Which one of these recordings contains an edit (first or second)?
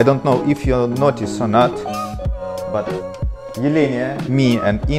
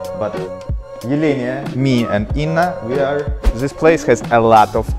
second